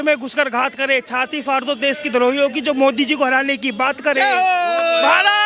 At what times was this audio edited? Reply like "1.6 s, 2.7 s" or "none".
none